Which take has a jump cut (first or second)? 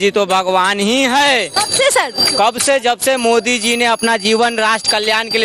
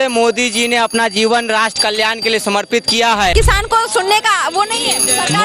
second